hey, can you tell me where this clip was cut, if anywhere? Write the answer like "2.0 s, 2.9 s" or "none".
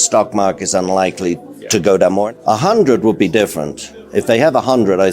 2.3 s

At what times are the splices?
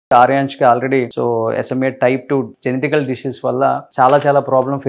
1.1 s, 2.5 s

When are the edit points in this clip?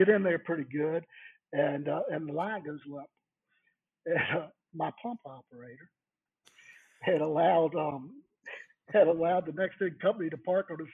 none

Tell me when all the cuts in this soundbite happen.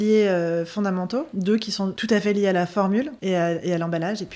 1.3 s, 3.1 s

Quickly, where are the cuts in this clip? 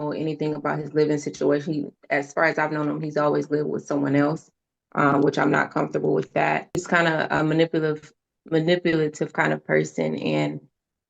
6.8 s

